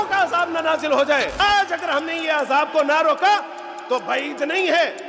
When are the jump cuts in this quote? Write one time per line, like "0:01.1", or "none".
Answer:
0:01.4